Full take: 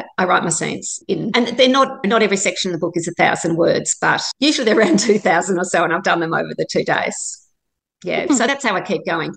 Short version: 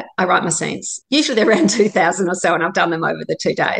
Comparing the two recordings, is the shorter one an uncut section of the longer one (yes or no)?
no